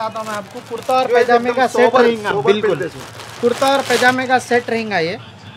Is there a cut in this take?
no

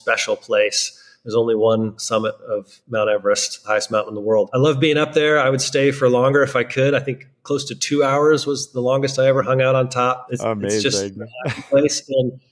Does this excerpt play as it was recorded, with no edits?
no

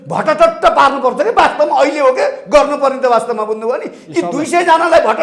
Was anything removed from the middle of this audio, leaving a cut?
no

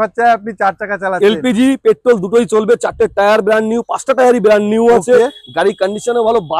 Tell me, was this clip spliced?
no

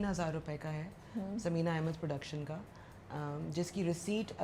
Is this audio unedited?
yes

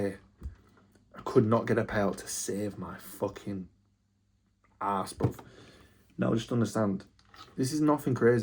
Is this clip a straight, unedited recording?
yes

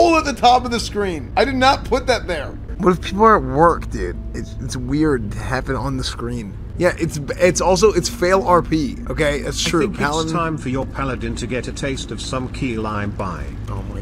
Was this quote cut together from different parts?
yes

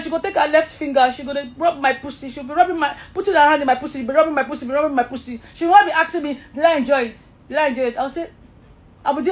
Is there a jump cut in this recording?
no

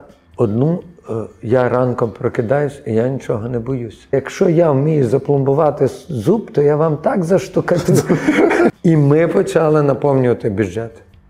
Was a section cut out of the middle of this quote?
yes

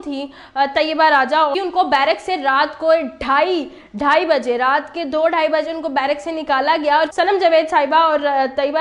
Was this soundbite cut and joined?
yes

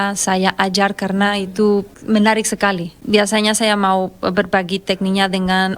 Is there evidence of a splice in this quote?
yes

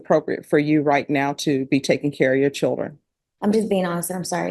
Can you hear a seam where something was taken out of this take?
yes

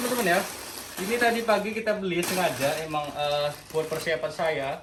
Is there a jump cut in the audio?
no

